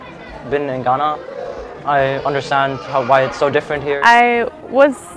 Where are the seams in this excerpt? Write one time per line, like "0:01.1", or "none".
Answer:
0:04.0